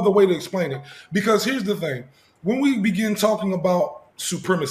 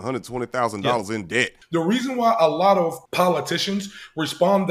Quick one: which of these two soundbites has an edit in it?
second; 2 cuts; at 1.5 s, 3.0 s

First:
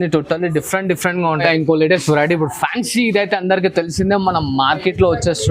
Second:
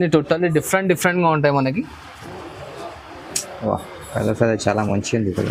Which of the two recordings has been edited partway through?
first; 1 cut; at 1.4 s

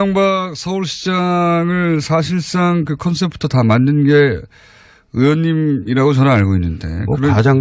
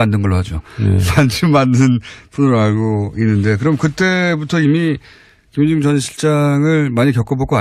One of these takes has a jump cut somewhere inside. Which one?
first; 1 cut; at 5.4 s

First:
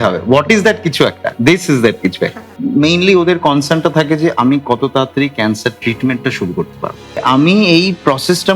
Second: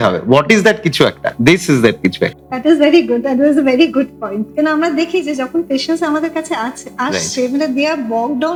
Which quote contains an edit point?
first; 2 cuts; at 2.5 s, 7.2 s

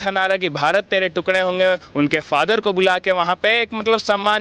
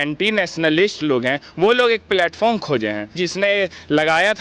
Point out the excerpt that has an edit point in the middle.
second; 1 cut; at 3.2 s

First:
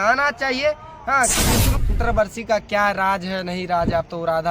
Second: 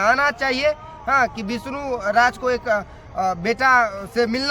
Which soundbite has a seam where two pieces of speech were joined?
first; 1 cut; at 1.8 s

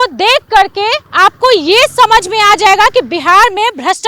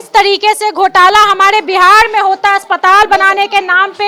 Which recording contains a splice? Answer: first; 1 cut; at 1.0 s

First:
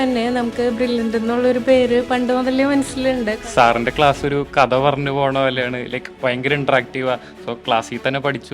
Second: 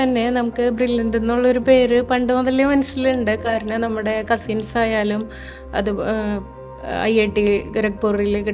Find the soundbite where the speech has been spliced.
first; 1 cut; at 3.4 s

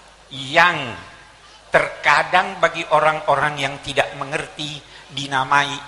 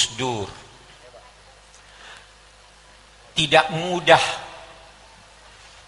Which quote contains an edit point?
second; 1 cut; at 1.0 s

